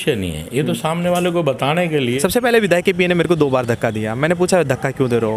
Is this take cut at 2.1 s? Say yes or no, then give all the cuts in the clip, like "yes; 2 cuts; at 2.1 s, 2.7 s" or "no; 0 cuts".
yes; 1 cut; at 2.1 s